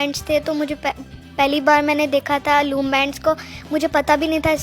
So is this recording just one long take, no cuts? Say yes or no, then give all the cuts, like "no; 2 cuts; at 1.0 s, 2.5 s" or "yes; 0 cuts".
yes; 0 cuts